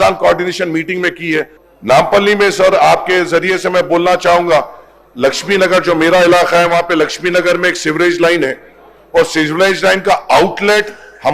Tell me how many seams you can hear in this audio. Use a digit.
1